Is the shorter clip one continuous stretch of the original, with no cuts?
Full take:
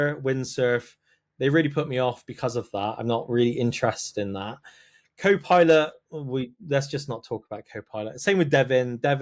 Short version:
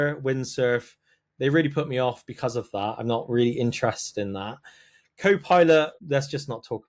no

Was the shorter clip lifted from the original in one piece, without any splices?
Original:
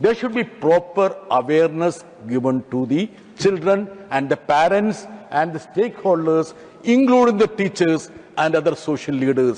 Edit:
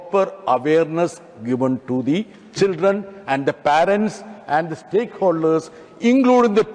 yes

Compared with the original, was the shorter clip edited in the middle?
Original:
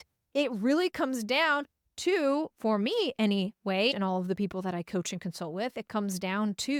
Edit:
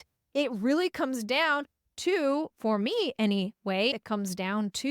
yes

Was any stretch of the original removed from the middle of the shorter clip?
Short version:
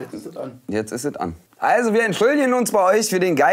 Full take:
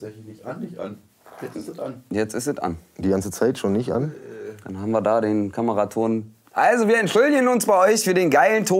yes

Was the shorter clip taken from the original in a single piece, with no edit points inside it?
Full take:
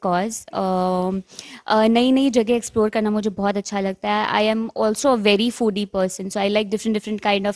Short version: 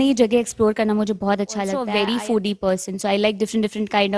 no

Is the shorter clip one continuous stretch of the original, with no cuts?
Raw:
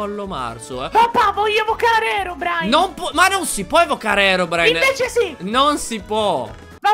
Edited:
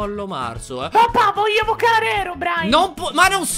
yes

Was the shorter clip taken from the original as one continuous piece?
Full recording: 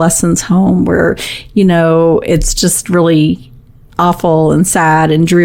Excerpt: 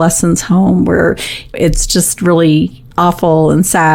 no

